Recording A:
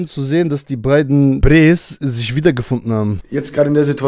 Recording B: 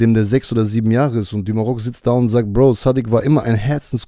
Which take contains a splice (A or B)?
A